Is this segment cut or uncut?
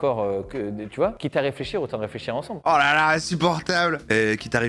cut